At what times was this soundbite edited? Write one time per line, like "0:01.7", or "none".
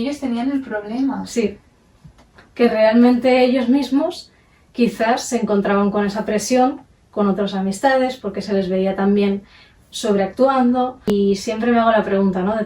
0:11.1